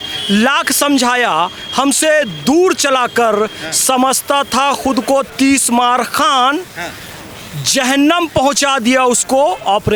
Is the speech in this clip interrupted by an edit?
no; 0 cuts

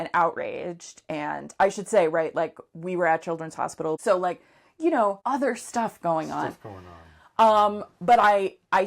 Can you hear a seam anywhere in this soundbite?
yes; 2 cuts; at 4.0 s, 5.2 s

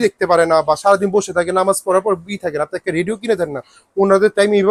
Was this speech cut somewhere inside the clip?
no; 0 cuts

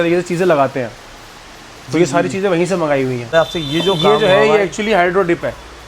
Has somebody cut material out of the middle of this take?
yes; 1 cut; at 3.3 s

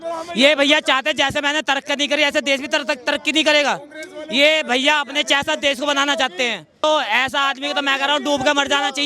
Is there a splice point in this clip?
yes; 1 cut; at 6.8 s

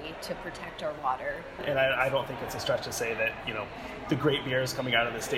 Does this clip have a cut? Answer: yes; 1 cut; at 1.6 s

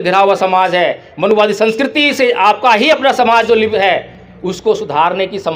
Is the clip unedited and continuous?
no; 1 cut; at 3.7 s

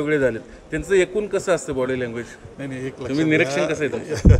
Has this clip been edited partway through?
no; 0 cuts

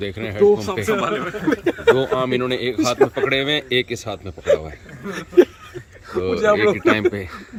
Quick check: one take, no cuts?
yes; 0 cuts

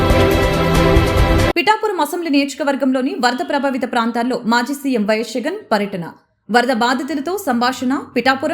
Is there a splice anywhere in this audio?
yes; 1 cut; at 1.5 s

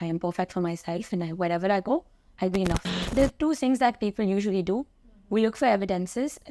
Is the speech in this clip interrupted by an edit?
yes; 1 cut; at 3.0 s

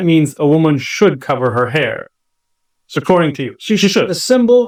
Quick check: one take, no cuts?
yes; 0 cuts

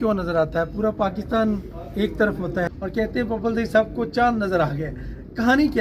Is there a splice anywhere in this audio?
yes; 1 cut; at 2.7 s

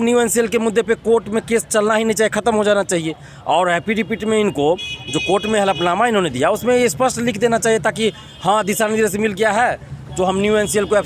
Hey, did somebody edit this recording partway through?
no; 0 cuts

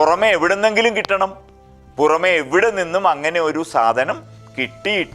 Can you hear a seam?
no; 0 cuts

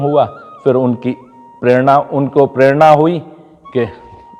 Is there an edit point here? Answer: no; 0 cuts

